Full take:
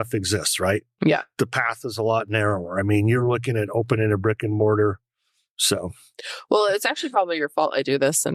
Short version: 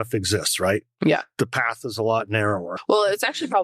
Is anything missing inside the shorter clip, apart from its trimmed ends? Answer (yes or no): yes